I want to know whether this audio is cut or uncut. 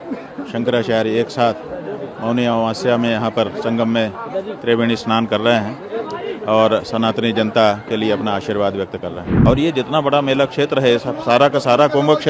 cut